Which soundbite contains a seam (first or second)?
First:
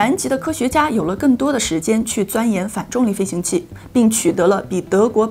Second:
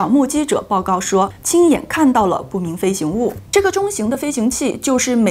second